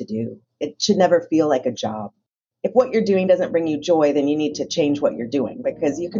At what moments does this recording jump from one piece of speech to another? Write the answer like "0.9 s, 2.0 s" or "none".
2.4 s